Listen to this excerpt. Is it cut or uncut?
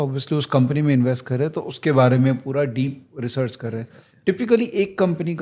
uncut